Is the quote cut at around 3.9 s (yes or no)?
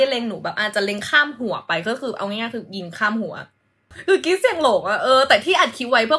yes